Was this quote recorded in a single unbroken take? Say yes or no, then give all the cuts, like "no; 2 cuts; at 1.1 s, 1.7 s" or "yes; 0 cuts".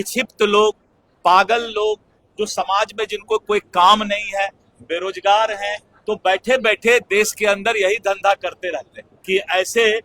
no; 1 cut; at 9.1 s